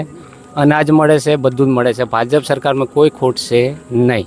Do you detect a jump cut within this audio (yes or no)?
no